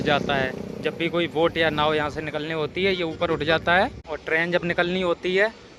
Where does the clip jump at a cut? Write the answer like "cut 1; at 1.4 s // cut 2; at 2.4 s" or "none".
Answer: cut 1; at 4.1 s